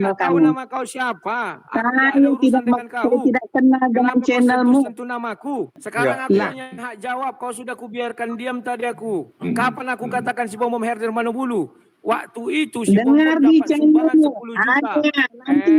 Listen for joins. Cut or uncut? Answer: cut